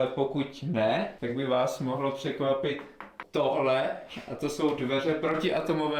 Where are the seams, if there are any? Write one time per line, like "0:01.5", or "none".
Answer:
none

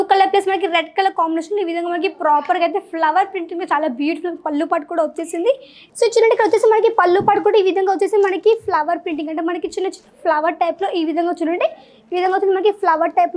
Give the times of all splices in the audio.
0:05.8

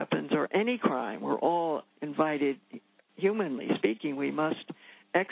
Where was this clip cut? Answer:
0:02.0

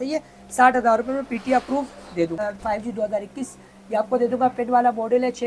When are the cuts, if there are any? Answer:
0:02.4

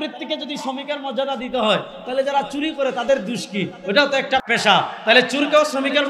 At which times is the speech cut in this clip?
0:04.4

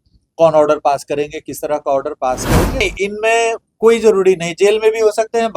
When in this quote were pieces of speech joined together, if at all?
0:02.8

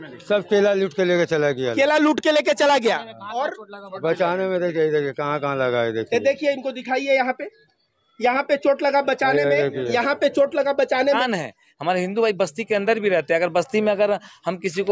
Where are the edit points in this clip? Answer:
0:11.2

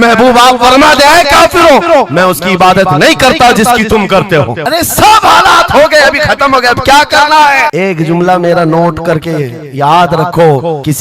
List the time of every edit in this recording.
none

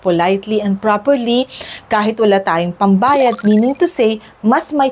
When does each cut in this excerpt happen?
0:03.4

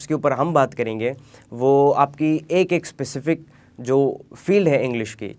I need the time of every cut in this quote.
none

